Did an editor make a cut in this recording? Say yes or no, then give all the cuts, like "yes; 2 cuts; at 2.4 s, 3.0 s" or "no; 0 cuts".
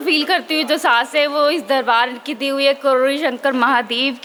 no; 0 cuts